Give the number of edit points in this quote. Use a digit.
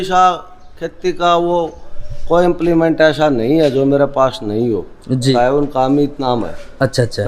1